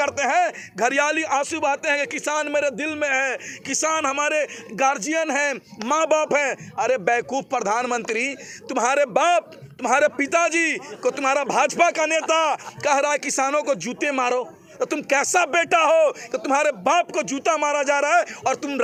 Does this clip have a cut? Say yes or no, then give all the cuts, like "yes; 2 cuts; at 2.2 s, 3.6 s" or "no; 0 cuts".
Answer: no; 0 cuts